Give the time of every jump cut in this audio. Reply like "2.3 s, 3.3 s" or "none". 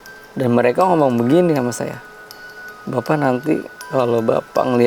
none